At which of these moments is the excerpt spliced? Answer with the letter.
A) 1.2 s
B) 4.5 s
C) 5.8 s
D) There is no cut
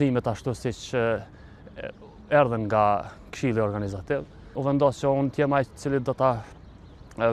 B